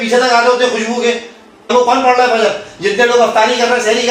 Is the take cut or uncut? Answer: cut